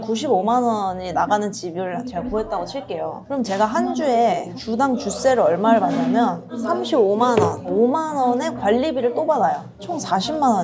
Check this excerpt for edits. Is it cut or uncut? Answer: uncut